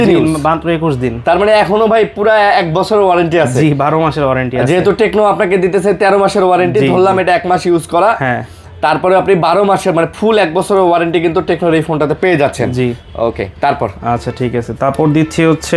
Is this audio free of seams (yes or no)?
yes